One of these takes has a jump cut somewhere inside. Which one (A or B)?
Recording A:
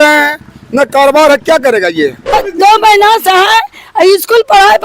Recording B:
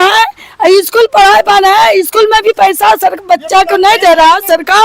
A